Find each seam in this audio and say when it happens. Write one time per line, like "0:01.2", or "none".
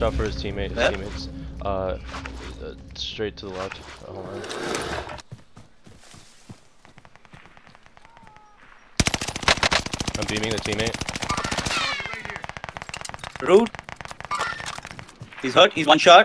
0:05.2